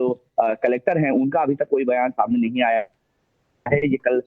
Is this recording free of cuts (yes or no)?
no